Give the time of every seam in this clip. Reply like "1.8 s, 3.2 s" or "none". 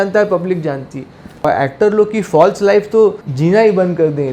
1.4 s, 3.3 s